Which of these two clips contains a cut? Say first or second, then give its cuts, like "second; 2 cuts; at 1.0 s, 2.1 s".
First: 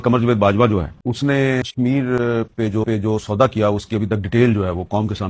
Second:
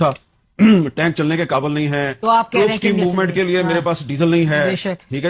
first; 2 cuts; at 0.9 s, 1.6 s